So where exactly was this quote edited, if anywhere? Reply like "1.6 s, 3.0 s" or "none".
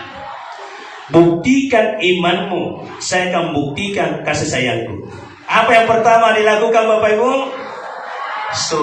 5.4 s